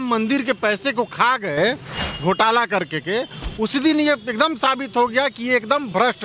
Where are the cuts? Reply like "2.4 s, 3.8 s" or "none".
none